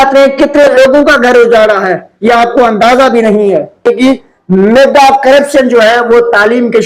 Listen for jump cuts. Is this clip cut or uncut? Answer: cut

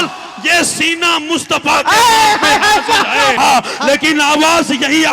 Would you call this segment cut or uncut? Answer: cut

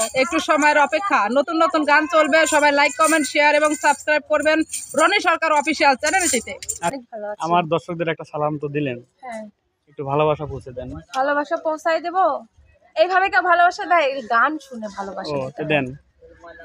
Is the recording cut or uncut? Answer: cut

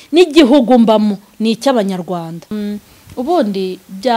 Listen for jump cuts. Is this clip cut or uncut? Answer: cut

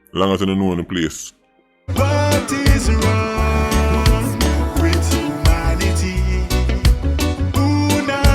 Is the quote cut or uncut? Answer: cut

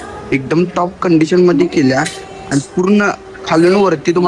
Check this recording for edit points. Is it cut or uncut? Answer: uncut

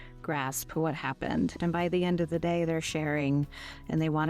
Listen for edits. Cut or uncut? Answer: cut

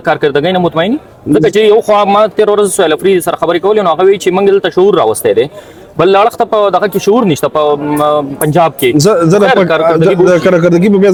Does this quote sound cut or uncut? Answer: uncut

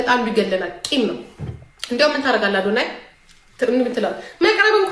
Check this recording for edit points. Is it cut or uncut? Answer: uncut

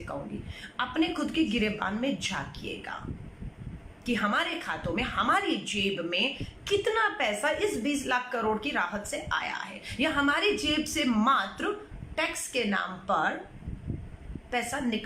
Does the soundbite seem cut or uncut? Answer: uncut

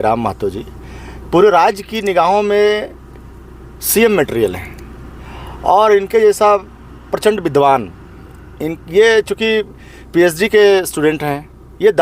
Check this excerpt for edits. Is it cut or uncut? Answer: uncut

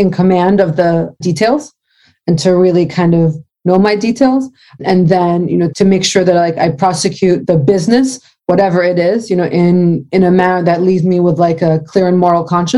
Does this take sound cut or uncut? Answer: cut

